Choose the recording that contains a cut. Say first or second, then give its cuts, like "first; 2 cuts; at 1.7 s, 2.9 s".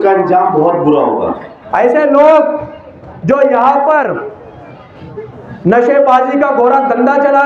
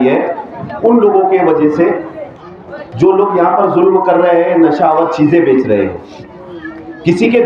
first; 1 cut; at 1.5 s